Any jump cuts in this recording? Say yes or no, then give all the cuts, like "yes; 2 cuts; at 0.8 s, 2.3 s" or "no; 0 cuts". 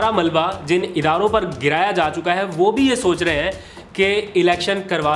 no; 0 cuts